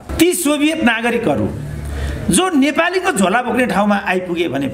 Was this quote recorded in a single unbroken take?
yes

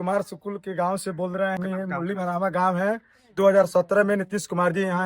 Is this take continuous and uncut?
no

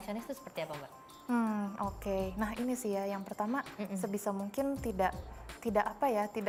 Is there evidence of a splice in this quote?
no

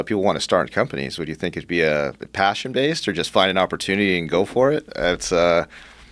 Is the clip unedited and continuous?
yes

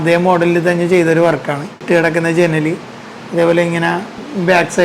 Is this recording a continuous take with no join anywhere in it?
no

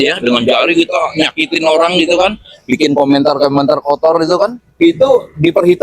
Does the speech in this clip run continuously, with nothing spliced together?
no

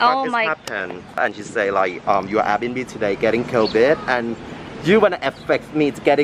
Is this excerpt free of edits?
no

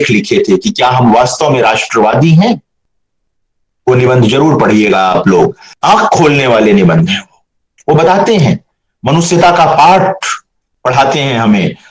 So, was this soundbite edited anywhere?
no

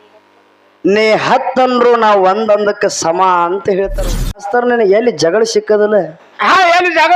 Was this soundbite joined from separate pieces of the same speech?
yes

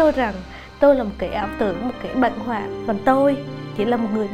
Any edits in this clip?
yes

